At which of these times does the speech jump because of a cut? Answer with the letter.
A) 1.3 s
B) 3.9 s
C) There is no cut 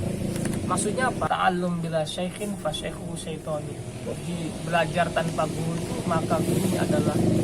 A